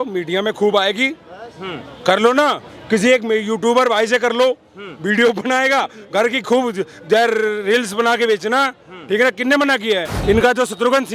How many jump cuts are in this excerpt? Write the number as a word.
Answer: one